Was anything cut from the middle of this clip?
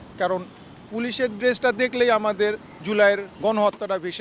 yes; 2 cuts; at 2.7 s, 3.3 s

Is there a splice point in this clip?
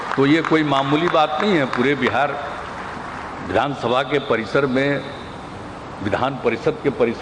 no; 0 cuts

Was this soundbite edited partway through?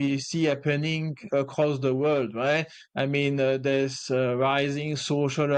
no; 0 cuts

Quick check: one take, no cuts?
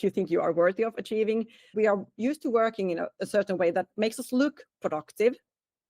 no; 1 cut; at 1.7 s

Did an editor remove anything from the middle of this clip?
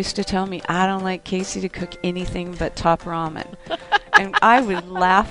no; 0 cuts

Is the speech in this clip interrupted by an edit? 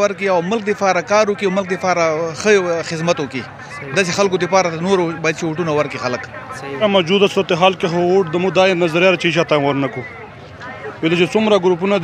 yes; 1 cut; at 6.8 s

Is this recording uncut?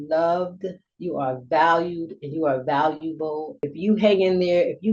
no; 1 cut; at 3.6 s

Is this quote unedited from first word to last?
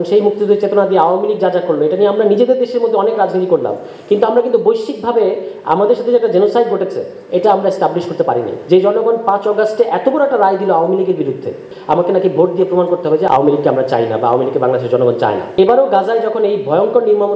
no; 4 cuts; at 8.5 s, 11.7 s, 13.3 s, 15.5 s

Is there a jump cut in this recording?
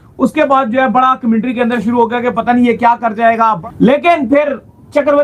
yes; 1 cut; at 3.6 s

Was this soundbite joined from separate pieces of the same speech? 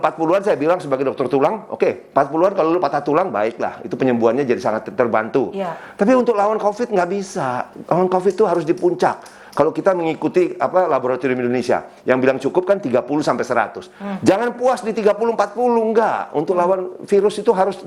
no; 0 cuts

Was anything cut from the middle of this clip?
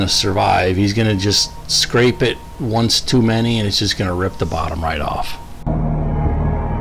no; 0 cuts

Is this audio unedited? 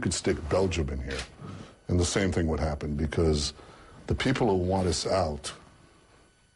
no; 1 cut; at 2.9 s

